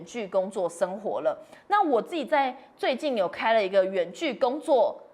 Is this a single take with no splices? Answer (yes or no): yes